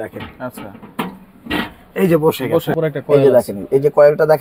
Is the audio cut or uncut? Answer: cut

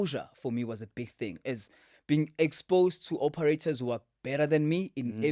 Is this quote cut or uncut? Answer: uncut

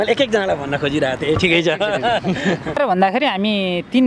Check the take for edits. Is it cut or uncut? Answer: cut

